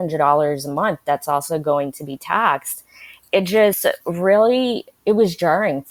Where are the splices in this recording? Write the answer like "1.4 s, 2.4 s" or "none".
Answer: none

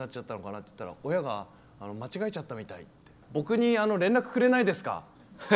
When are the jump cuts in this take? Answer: 3.2 s

